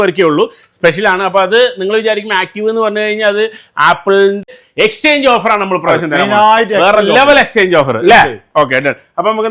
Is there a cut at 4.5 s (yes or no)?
yes